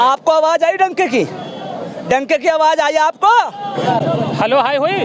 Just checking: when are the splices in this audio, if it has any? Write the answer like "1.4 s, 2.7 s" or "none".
3.8 s